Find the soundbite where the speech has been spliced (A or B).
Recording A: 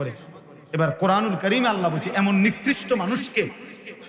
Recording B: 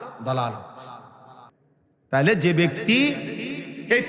B